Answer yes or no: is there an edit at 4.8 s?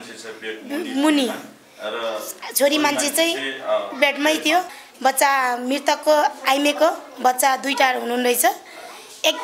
yes